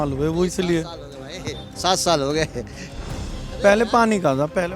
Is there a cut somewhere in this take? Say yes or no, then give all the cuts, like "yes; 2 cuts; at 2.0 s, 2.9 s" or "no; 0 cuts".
no; 0 cuts